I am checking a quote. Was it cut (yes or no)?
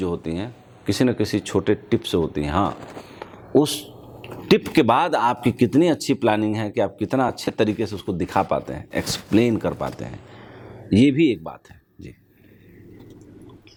no